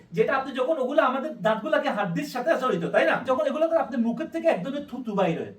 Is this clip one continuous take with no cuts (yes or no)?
no